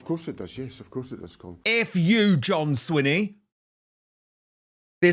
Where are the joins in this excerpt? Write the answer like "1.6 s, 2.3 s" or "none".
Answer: 1.5 s